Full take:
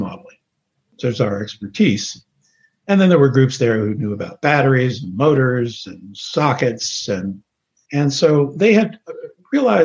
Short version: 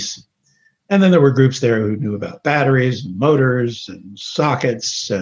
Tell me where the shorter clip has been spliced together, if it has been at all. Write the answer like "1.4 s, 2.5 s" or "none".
none